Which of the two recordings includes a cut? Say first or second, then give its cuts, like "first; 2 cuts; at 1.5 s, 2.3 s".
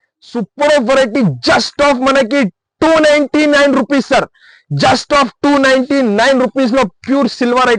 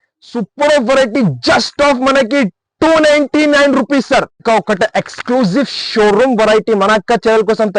second; 1 cut; at 4.3 s